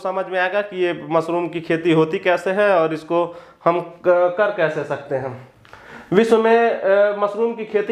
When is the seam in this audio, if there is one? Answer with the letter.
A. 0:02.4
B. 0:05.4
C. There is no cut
C